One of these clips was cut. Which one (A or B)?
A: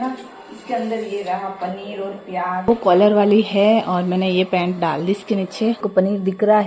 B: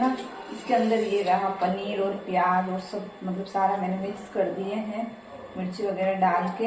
A